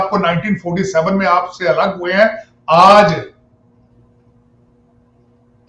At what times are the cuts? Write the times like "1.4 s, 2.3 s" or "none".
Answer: none